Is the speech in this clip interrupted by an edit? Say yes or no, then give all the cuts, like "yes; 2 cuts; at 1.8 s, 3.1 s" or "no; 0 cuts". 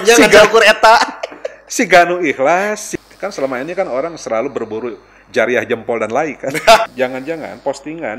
yes; 2 cuts; at 2.9 s, 6.9 s